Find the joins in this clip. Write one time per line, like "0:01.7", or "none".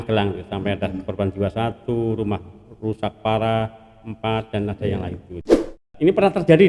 0:05.4